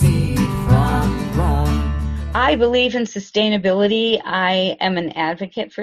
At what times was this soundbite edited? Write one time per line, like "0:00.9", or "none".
0:02.1